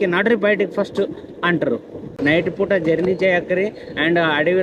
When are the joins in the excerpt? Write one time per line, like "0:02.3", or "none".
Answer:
0:02.1